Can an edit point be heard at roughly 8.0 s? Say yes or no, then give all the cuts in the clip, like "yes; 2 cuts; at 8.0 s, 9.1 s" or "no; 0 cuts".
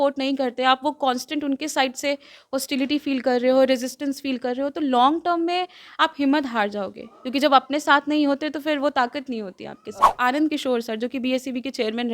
no; 1 cut; at 10.1 s